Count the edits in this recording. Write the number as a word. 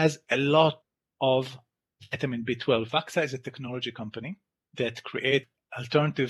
one